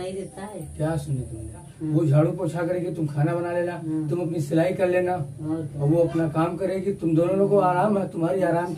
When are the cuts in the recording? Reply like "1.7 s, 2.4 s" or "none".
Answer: 1.7 s